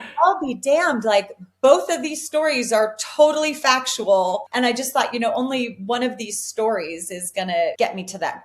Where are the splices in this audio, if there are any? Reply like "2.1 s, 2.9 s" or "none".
4.5 s, 7.7 s